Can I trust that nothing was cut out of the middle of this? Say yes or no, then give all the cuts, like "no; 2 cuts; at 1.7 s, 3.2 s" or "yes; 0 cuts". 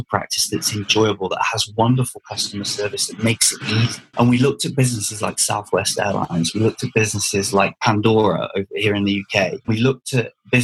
yes; 0 cuts